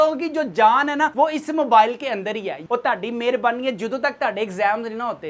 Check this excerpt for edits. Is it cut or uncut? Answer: cut